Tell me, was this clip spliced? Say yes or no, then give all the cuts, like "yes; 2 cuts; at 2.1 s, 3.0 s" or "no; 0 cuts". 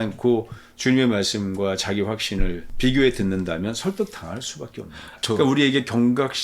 yes; 1 cut; at 5.2 s